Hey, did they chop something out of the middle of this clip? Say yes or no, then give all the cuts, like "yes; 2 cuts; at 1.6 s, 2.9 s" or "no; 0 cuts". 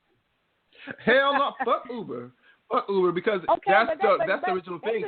no; 0 cuts